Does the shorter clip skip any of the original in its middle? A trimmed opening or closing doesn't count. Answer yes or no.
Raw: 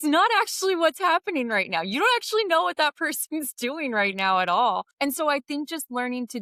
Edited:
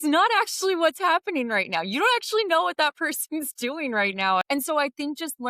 yes